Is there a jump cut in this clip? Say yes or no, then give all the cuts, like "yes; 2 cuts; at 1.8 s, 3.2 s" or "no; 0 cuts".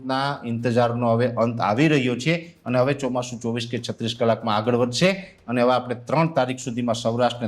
no; 0 cuts